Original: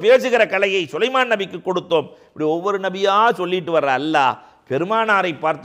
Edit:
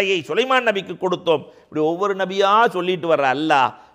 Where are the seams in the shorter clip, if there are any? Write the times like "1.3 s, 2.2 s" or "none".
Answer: none